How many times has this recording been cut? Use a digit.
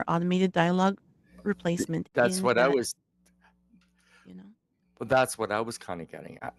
0